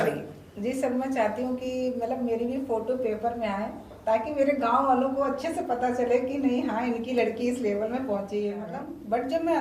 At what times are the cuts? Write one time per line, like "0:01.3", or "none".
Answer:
0:08.6